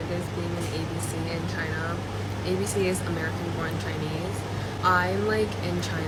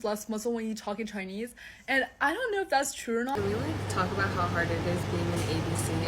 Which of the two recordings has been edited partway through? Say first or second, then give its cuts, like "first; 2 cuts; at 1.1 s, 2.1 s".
second; 1 cut; at 3.3 s